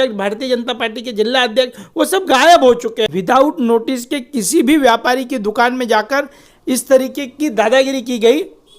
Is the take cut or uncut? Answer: cut